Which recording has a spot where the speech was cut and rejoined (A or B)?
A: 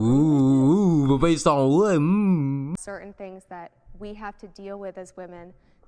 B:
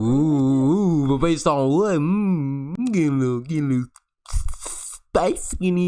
A